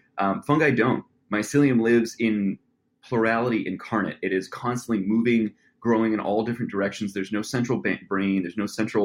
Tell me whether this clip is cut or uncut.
uncut